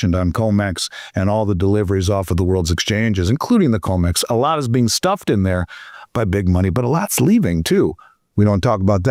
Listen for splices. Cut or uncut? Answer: uncut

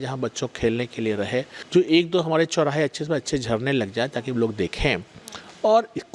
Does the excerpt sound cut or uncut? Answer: uncut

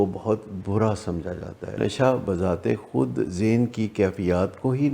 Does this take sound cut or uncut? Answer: cut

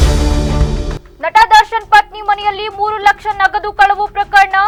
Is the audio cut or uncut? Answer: uncut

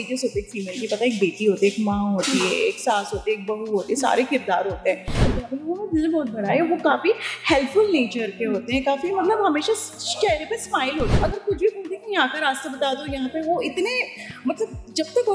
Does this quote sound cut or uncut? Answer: cut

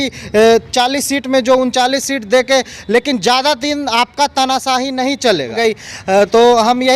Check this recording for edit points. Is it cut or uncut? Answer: cut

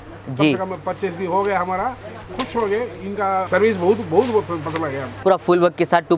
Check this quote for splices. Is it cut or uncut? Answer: cut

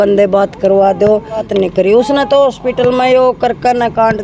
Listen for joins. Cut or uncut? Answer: cut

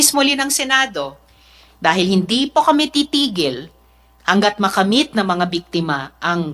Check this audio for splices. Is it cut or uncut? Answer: uncut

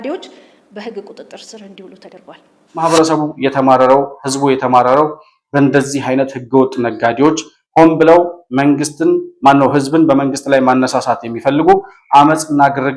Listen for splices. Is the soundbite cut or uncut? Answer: cut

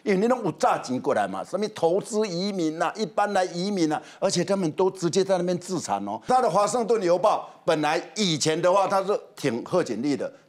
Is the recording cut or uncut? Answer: cut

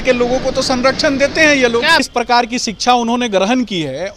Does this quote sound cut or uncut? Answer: cut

